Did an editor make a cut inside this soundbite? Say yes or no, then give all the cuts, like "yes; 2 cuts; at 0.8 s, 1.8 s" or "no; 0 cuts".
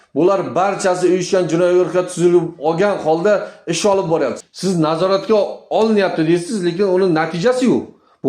yes; 1 cut; at 4.4 s